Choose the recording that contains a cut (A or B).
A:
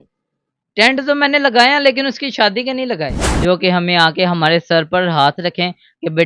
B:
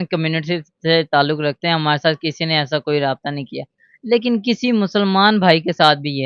A